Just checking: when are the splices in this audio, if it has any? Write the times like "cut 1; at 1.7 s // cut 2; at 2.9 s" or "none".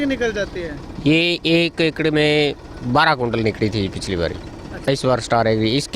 cut 1; at 4.9 s